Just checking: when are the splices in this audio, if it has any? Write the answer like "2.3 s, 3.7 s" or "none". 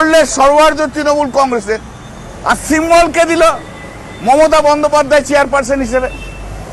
none